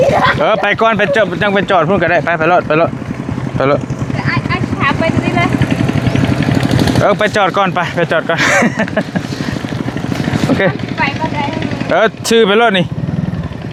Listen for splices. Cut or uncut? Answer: uncut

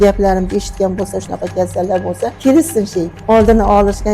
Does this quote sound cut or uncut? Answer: cut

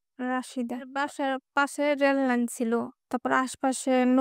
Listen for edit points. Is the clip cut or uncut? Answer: cut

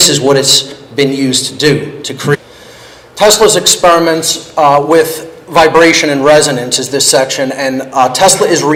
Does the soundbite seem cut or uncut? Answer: uncut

